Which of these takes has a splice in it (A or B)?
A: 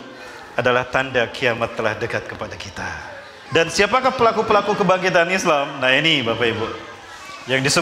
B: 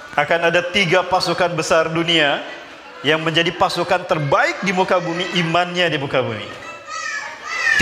A